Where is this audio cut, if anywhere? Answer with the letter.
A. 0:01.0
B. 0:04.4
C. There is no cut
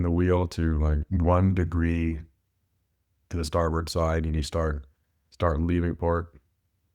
A